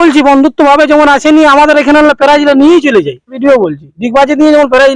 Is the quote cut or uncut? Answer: cut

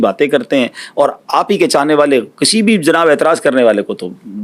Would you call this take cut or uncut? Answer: uncut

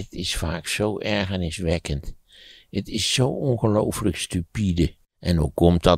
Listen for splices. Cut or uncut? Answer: cut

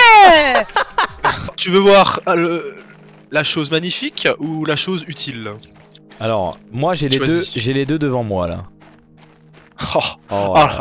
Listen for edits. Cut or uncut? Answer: cut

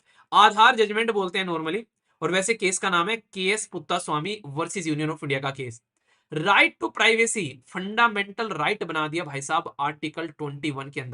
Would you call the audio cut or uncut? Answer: uncut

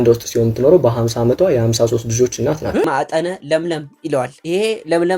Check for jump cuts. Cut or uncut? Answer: cut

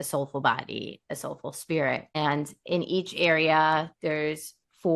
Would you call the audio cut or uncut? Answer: cut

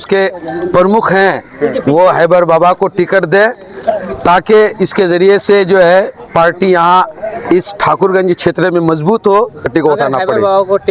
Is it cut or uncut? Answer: cut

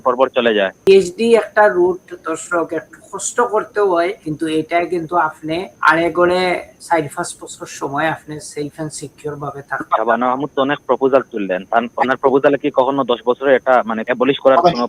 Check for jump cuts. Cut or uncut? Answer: cut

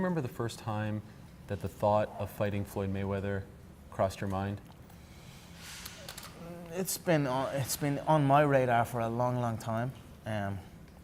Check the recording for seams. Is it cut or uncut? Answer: uncut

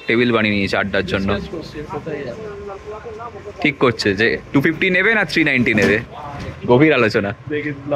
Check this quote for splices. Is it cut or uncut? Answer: uncut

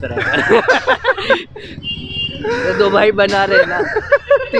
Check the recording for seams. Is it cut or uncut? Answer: uncut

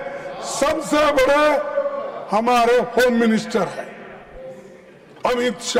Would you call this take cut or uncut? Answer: uncut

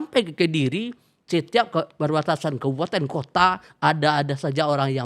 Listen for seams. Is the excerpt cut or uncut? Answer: uncut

